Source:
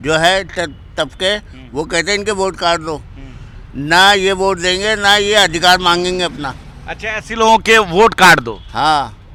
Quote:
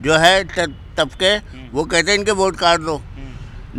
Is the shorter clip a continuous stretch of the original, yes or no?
yes